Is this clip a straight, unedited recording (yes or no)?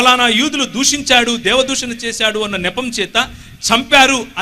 yes